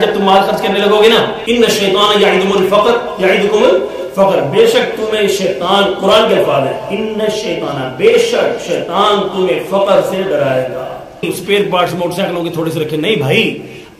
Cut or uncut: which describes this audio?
cut